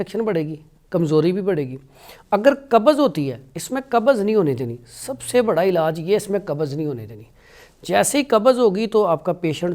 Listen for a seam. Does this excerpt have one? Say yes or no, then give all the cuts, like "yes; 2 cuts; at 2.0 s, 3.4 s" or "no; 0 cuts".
no; 0 cuts